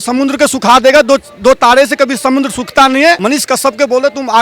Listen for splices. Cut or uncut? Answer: cut